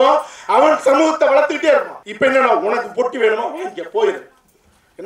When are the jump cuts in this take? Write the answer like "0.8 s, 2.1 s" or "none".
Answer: 2.0 s